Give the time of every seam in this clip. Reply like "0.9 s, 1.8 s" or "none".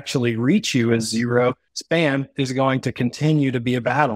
1.7 s